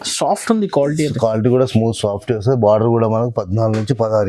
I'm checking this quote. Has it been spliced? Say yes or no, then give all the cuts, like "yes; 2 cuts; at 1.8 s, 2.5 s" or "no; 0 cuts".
no; 0 cuts